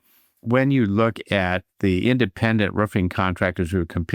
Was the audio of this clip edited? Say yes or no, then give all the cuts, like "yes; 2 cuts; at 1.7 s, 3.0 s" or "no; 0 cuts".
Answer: no; 0 cuts